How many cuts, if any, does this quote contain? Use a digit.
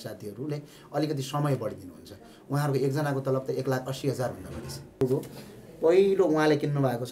1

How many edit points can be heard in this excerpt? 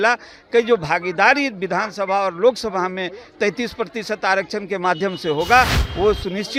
0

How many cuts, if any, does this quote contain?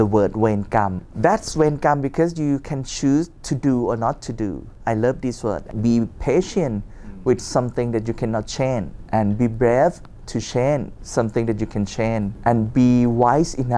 6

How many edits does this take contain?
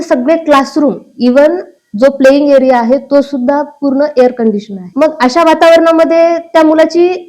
1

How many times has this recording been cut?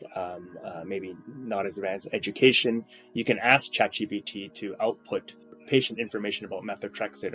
1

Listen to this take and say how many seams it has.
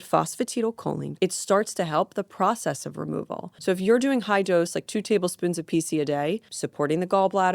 3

